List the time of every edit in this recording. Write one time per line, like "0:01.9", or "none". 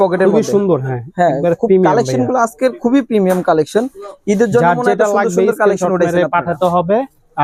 none